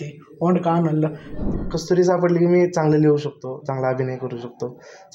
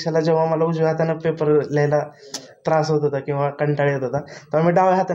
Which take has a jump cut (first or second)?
first